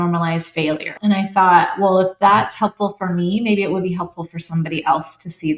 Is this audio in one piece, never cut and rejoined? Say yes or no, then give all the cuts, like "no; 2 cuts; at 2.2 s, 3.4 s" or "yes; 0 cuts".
no; 1 cut; at 0.9 s